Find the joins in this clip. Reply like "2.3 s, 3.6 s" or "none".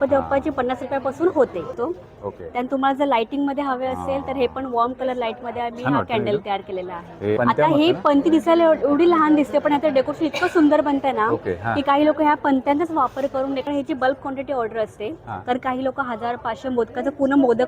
1.6 s, 7.4 s, 13.6 s